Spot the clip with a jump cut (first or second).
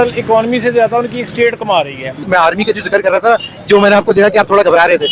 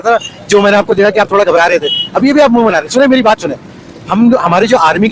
first